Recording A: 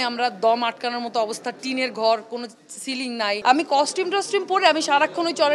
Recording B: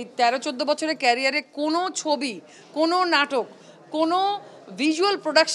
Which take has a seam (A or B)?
A